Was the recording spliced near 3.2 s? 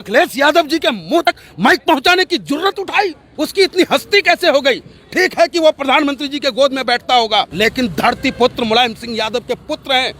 yes; 3 cuts; at 1.3 s, 3.2 s, 7.5 s

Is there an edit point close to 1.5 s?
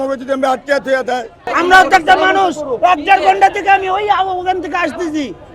yes; 1 cut; at 1.5 s

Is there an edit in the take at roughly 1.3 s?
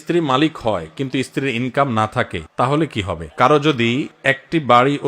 no; 1 cut; at 3.2 s

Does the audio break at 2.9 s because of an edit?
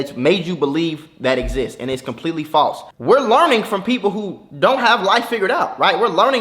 yes; 1 cut; at 2.9 s

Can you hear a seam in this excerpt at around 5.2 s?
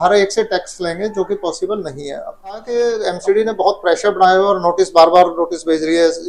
no; 1 cut; at 2.6 s

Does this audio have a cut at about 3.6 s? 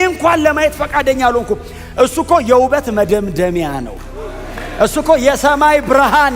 no; 0 cuts

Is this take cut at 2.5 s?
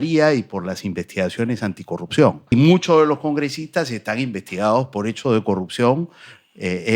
yes; 1 cut; at 2.5 s

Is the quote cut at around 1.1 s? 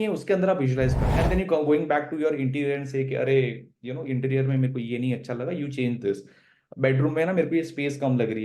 yes; 1 cut; at 1.1 s

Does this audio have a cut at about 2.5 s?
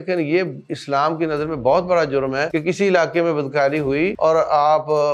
yes; 2 cuts; at 2.5 s, 4.1 s

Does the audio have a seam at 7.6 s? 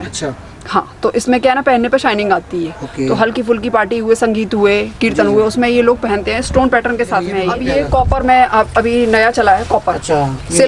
yes; 1 cut; at 7.6 s

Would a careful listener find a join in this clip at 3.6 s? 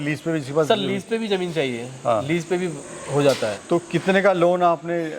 yes; 1 cut; at 3.6 s

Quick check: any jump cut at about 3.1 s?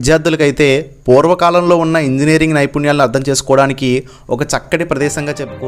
no; 0 cuts

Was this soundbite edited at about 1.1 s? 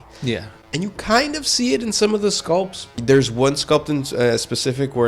no; 1 cut; at 2.8 s

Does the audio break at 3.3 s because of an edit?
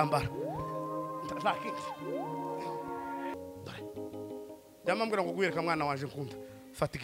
yes; 1 cut; at 3.3 s

